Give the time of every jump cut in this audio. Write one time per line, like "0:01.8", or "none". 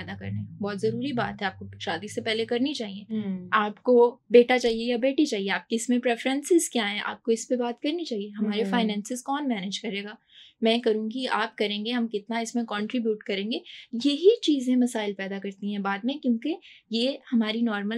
none